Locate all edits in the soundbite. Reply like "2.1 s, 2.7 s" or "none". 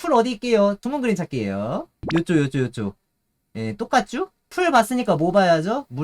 0.8 s, 2.0 s